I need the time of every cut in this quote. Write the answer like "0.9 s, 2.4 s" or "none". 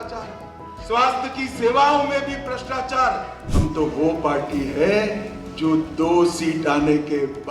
3.4 s